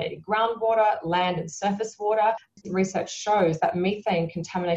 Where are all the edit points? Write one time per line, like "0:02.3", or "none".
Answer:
0:02.5